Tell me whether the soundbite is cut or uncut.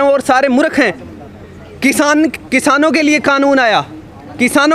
uncut